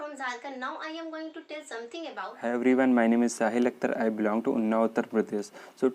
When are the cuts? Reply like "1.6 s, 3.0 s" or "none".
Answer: 2.4 s